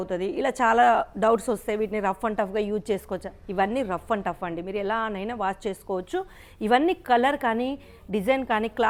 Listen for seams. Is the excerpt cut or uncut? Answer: uncut